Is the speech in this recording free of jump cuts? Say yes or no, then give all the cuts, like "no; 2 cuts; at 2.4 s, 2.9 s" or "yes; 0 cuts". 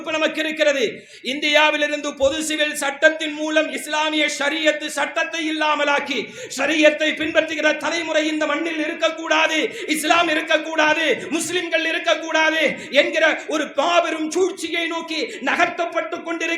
yes; 0 cuts